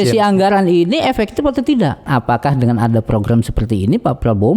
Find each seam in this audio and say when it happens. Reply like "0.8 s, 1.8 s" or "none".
2.1 s